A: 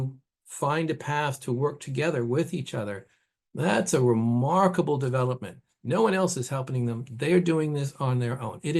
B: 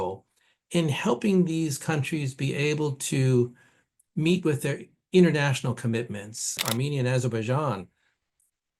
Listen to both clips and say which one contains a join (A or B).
B